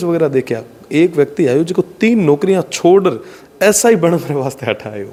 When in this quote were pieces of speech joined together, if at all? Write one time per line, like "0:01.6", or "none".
none